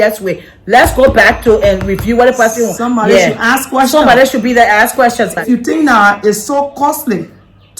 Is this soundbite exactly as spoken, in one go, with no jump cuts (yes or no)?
no